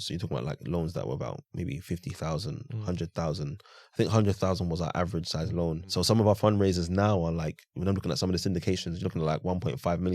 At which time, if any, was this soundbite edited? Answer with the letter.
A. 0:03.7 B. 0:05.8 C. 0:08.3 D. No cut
B